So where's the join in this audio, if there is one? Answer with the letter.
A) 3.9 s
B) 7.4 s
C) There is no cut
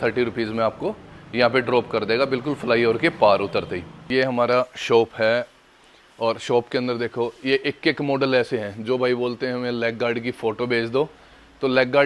A